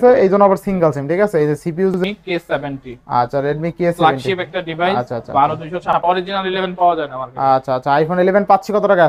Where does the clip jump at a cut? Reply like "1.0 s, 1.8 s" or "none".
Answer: 1.9 s, 6.0 s